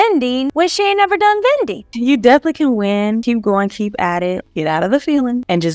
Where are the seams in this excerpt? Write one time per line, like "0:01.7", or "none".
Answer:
0:01.8
0:03.2
0:04.5